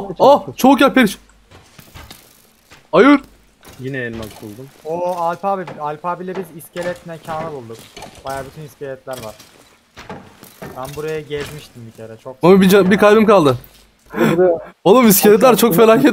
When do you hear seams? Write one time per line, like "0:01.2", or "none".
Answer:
0:14.0